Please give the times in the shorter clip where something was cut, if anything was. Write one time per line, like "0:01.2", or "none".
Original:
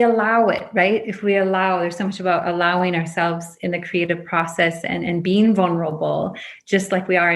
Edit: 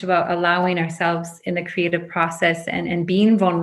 none